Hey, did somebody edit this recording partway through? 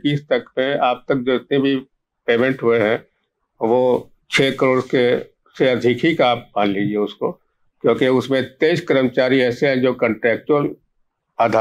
no; 0 cuts

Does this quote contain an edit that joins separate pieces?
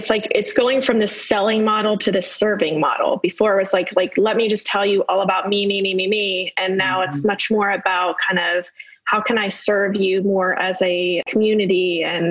yes; 1 cut; at 11.3 s

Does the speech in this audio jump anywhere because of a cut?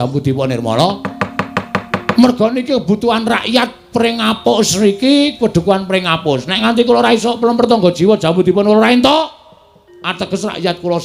no; 0 cuts

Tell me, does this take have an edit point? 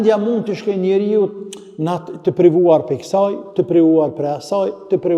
no; 0 cuts

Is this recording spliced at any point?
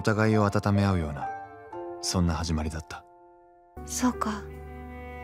yes; 1 cut; at 3.8 s

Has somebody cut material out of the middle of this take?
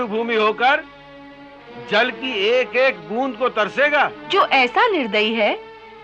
yes; 1 cut; at 4.2 s

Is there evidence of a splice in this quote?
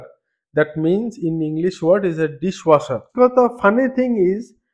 yes; 1 cut; at 3.0 s

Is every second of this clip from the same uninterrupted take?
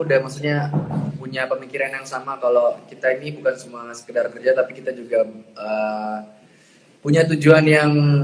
yes; 0 cuts

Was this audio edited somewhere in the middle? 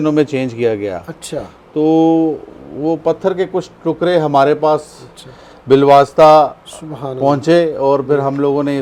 no; 0 cuts

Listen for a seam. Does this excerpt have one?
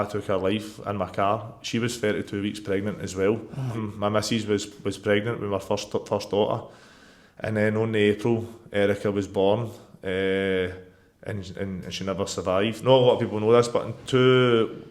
yes; 2 cuts; at 3.8 s, 12.8 s

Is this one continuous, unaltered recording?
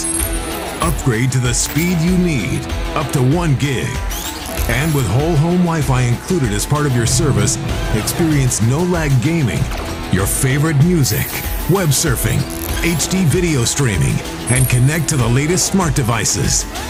yes; 0 cuts

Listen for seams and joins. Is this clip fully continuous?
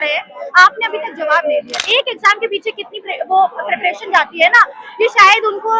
no; 1 cut; at 1.8 s

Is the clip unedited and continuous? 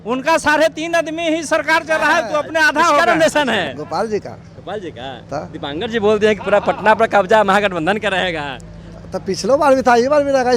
no; 1 cut; at 3.0 s

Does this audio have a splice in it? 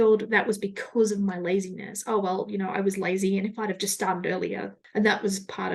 no; 0 cuts

